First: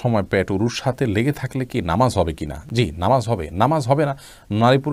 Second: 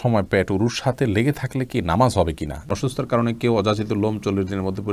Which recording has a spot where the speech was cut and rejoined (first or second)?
second